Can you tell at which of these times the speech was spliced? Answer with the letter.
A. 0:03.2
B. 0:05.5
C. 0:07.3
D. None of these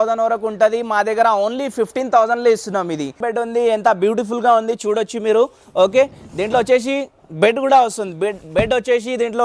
A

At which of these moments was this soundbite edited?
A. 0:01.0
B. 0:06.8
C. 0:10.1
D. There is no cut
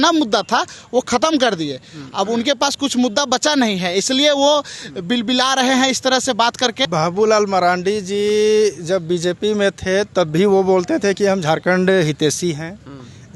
B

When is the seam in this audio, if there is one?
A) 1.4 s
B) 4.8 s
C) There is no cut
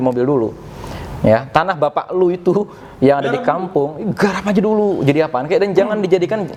C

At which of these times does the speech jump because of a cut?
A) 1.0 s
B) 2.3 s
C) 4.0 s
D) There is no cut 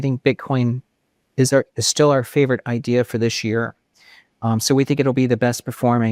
D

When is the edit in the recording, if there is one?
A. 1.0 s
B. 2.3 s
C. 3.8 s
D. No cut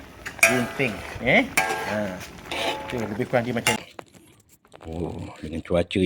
C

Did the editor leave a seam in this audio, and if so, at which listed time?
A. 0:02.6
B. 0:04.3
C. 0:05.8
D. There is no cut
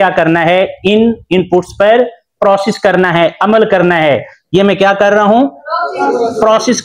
D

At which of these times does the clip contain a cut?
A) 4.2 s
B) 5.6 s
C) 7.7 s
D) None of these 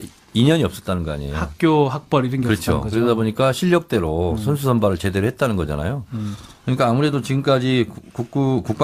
A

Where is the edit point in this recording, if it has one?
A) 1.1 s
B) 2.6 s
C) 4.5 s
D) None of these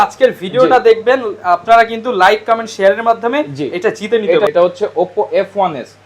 C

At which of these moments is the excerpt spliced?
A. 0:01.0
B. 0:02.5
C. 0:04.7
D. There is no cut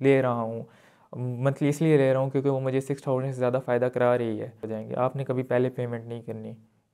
C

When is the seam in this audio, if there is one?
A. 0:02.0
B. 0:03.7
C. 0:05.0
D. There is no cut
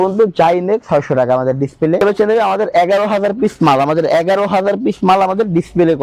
A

